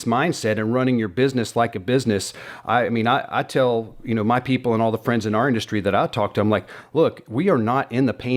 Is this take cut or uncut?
uncut